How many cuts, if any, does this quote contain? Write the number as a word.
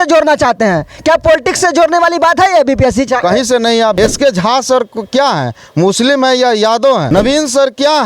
two